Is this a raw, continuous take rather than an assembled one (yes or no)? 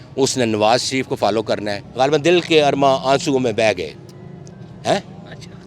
no